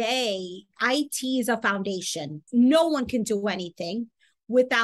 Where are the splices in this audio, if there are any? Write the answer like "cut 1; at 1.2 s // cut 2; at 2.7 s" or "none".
cut 1; at 2.4 s